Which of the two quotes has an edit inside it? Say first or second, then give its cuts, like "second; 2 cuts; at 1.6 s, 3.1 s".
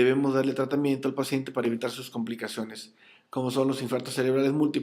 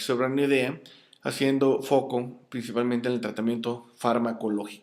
first; 1 cut; at 1.0 s